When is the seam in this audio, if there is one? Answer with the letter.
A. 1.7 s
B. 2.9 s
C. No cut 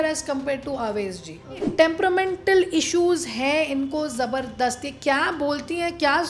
A